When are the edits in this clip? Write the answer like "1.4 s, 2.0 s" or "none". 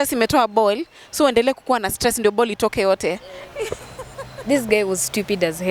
none